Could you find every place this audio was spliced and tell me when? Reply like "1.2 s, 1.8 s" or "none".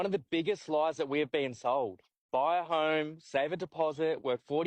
none